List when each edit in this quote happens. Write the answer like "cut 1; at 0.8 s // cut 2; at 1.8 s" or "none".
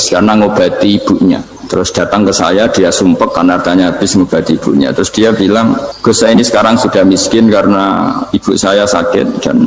cut 1; at 1.5 s // cut 2; at 5.9 s